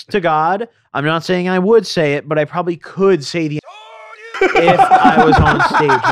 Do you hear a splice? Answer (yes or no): no